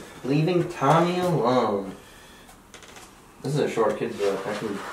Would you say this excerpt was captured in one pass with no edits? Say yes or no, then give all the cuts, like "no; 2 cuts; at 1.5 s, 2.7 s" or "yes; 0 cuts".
yes; 0 cuts